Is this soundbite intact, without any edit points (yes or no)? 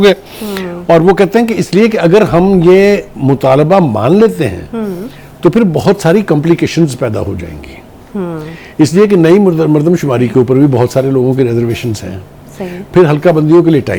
yes